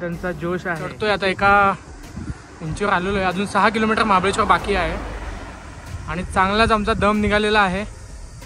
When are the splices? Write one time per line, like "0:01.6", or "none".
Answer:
0:00.9